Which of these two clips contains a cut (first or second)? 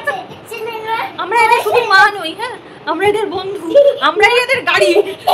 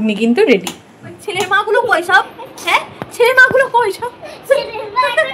second